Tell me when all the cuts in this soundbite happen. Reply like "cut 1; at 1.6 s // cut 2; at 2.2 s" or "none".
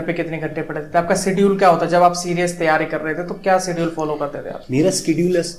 none